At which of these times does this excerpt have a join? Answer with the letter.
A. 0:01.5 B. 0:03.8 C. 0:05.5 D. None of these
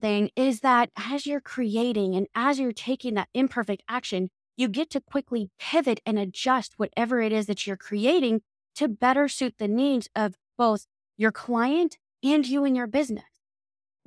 D